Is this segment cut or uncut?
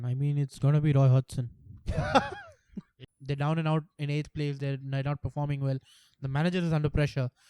cut